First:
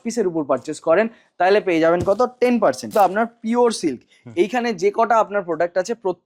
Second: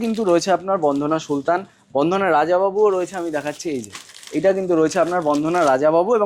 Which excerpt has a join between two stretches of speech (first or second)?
first